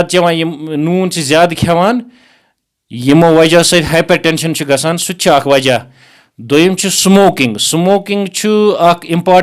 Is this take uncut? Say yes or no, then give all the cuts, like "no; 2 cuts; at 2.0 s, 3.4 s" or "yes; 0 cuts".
yes; 0 cuts